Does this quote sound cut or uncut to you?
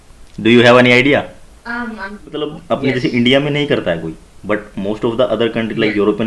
cut